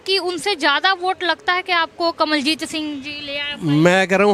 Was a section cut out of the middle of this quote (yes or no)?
no